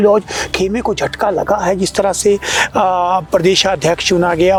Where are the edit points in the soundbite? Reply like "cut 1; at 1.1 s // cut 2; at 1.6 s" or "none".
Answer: none